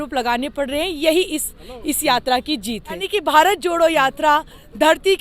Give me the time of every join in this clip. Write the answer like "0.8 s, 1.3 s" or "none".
3.1 s